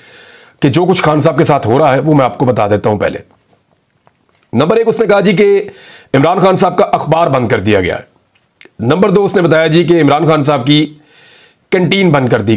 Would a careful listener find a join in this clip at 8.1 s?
no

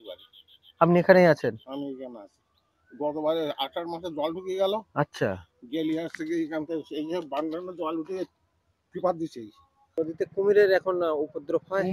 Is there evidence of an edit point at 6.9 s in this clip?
no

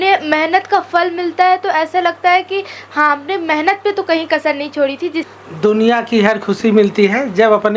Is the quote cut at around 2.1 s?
no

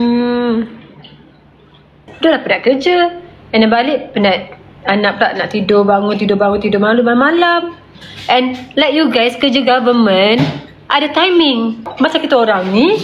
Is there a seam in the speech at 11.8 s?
yes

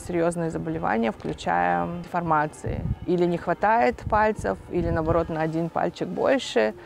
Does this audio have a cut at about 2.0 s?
yes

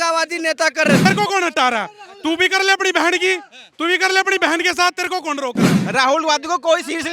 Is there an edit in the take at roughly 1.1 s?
yes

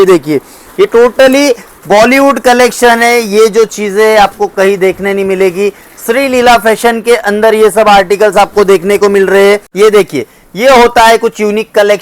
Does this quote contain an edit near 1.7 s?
no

